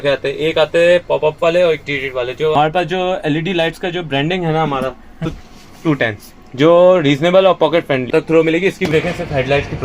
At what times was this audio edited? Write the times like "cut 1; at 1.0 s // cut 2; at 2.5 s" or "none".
cut 1; at 2.5 s // cut 2; at 5.2 s // cut 3; at 8.1 s // cut 4; at 8.9 s